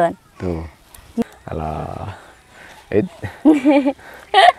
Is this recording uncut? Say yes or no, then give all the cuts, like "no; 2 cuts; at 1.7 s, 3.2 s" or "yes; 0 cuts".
no; 1 cut; at 1.2 s